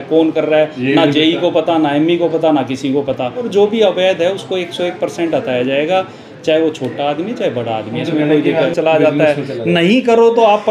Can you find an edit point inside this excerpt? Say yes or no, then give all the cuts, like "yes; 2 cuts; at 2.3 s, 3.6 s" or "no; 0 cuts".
yes; 2 cuts; at 3.4 s, 8.7 s